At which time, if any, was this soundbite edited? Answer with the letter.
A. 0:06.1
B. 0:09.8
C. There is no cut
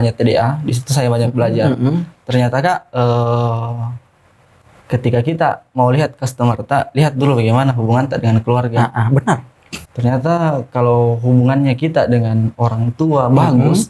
B